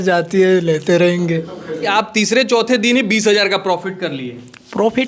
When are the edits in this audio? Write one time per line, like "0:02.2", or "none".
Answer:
0:01.9